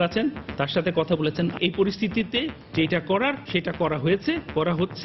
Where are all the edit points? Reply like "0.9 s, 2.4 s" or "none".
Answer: 1.6 s, 2.6 s, 3.4 s